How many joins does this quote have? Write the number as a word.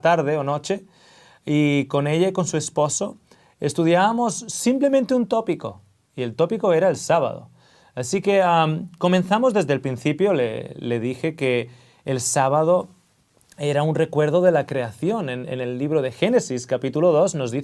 one